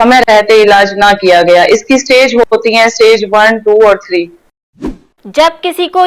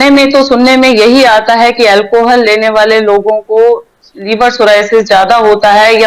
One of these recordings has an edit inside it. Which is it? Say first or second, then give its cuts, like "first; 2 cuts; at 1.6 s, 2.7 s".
first; 1 cut; at 4.8 s